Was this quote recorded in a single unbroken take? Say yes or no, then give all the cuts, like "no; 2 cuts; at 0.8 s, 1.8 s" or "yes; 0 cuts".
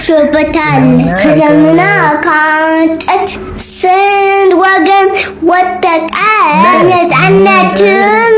yes; 0 cuts